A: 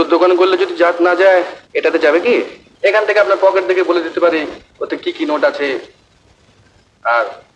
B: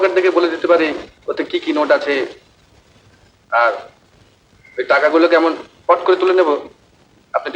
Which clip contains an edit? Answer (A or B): A